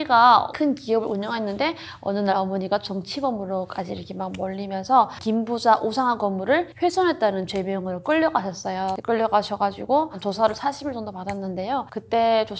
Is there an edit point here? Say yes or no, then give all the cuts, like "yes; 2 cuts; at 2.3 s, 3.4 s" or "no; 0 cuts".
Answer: no; 0 cuts